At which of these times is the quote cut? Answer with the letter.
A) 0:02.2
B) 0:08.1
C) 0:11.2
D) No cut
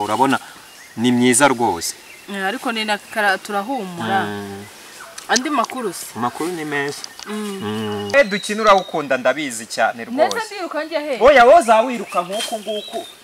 B